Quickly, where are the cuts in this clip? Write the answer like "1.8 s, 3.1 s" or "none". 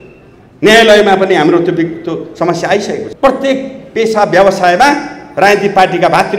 3.0 s